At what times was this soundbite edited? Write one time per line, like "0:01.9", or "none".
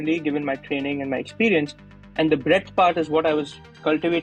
none